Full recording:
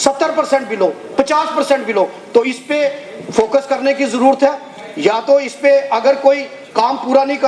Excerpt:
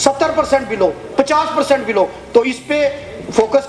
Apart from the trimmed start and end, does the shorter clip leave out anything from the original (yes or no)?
no